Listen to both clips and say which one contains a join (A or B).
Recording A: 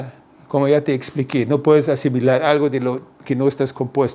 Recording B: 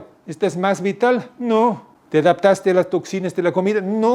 B